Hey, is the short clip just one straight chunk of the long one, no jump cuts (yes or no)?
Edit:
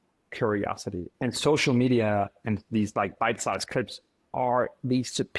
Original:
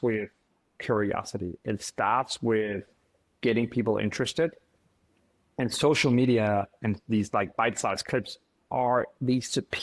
no